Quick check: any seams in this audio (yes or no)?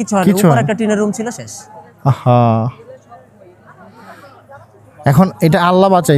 no